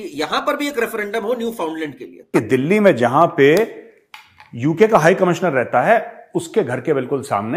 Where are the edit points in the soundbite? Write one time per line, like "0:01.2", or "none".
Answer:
0:02.3